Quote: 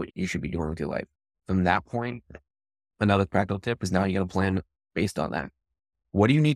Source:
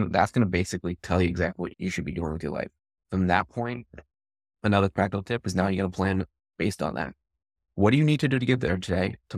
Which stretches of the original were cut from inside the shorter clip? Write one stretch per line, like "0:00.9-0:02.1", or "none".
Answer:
none